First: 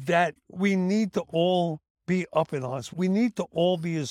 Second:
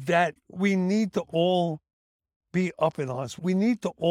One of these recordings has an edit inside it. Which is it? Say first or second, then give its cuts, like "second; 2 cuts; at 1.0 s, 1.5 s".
first; 1 cut; at 1.9 s